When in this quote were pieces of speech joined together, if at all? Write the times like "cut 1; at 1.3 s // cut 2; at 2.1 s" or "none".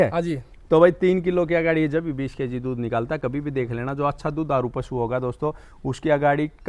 none

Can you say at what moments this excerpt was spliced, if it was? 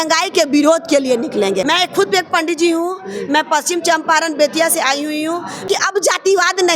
cut 1; at 1.6 s // cut 2; at 5.6 s

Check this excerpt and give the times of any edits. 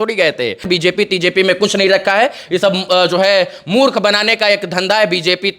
cut 1; at 0.9 s

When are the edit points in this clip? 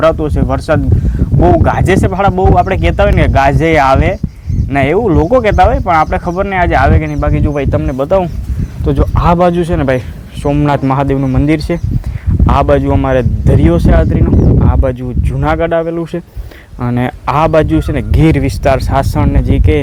none

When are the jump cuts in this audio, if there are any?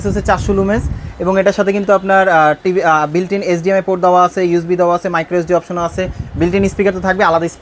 none

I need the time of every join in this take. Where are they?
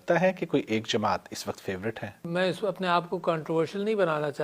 cut 1; at 2.1 s

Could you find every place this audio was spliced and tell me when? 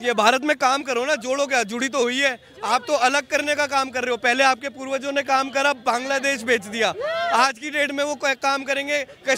none

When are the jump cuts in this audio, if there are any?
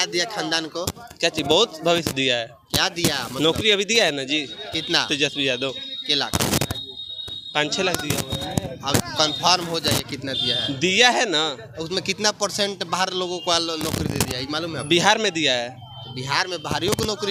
none

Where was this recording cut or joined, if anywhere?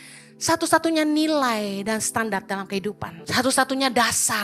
cut 1; at 3.1 s

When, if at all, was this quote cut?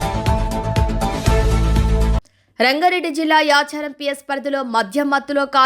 cut 1; at 2.2 s

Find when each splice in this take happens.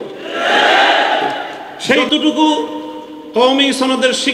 cut 1; at 2.0 s

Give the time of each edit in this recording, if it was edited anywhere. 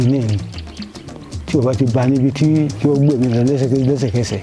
none

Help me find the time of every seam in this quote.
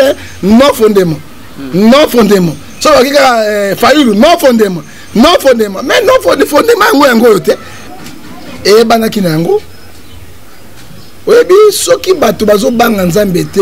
cut 1; at 7.7 s

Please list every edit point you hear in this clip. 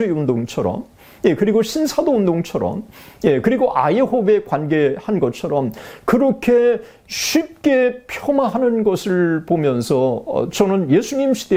none

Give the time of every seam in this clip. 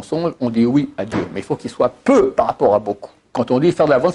cut 1; at 3.2 s

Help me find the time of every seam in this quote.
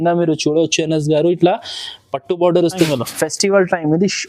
cut 1; at 2.8 s

